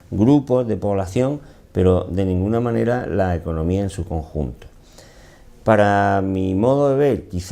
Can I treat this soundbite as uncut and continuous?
no; 1 cut; at 4.2 s

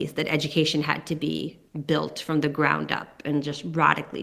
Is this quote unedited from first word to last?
yes; 0 cuts

